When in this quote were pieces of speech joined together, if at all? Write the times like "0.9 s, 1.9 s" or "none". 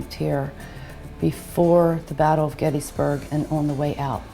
none